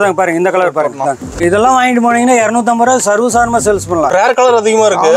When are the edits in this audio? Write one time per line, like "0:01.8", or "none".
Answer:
0:01.4
0:04.1